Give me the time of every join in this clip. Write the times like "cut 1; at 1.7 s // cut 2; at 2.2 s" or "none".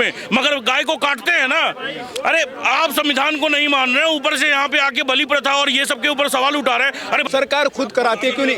cut 1; at 7.2 s